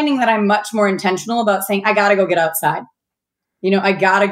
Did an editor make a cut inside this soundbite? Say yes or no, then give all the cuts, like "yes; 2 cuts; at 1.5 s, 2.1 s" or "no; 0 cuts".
no; 0 cuts